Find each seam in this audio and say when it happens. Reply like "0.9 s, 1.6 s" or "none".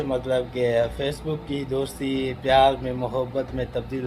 none